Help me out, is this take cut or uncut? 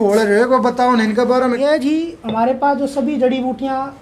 cut